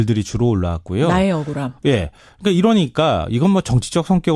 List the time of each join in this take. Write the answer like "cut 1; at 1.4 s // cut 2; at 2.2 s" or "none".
none